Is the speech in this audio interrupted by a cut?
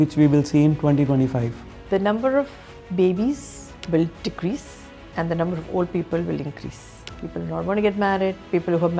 yes; 2 cuts; at 1.9 s, 7.1 s

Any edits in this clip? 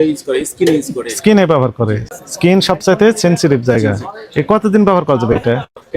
yes; 1 cut; at 2.1 s

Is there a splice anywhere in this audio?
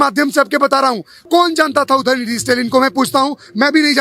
yes; 1 cut; at 1.1 s

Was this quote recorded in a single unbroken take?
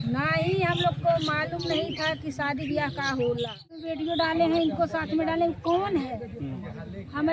no; 1 cut; at 3.9 s

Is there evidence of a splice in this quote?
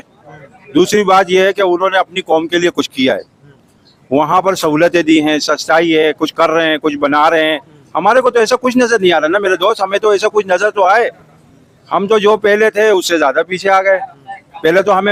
no; 0 cuts

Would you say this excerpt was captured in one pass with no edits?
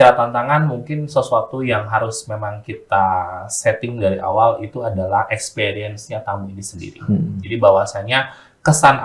yes; 0 cuts

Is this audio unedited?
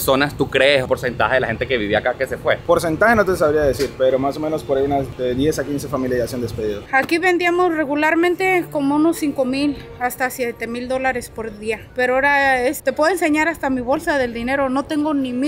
no; 6 cuts; at 0.9 s, 2.6 s, 5.1 s, 6.8 s, 11.9 s, 12.8 s

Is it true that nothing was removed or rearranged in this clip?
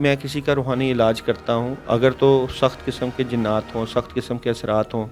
yes; 0 cuts

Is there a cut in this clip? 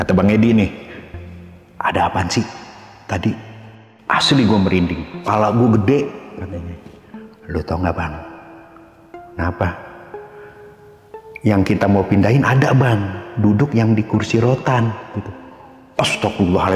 yes; 1 cut; at 5.1 s

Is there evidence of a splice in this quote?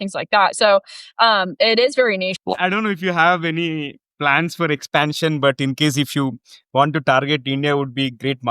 yes; 1 cut; at 2.5 s

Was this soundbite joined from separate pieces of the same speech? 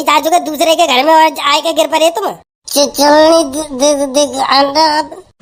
no; 0 cuts

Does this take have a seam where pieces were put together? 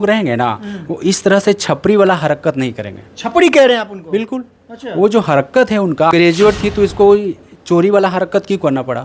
yes; 1 cut; at 6.1 s

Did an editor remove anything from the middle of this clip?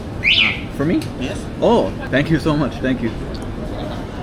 yes; 1 cut; at 2.0 s

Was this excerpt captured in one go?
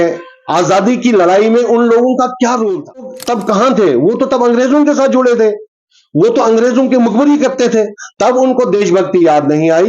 no; 1 cut; at 3.2 s

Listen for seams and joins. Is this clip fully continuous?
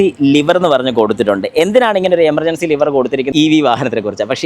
no; 1 cut; at 3.3 s

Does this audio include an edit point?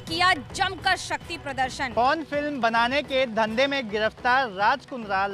yes; 1 cut; at 1.9 s

